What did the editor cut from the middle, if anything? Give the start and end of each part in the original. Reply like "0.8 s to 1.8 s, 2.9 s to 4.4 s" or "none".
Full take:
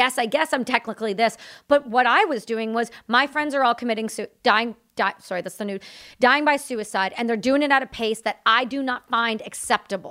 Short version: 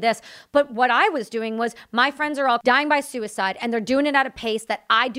3.8 s to 6.2 s